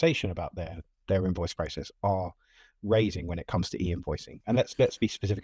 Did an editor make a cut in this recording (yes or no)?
no